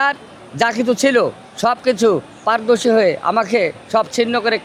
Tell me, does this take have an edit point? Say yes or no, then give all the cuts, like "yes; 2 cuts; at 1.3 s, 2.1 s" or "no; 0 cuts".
no; 0 cuts